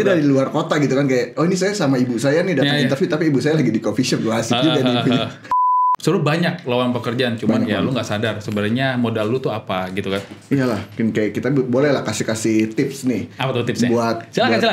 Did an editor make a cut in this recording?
yes; 1 cut; at 5.6 s

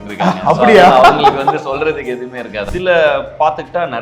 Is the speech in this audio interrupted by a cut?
yes; 1 cut; at 2.7 s

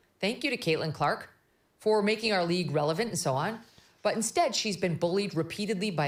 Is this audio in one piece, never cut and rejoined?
yes; 0 cuts

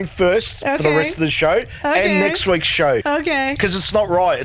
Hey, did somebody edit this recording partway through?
yes; 1 cut; at 3.4 s

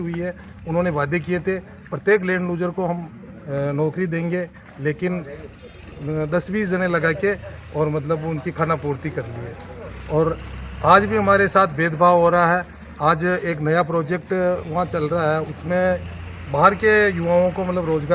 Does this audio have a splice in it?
no; 0 cuts

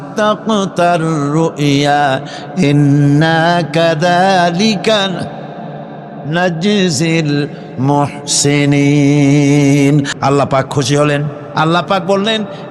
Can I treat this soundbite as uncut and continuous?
no; 1 cut; at 10.1 s

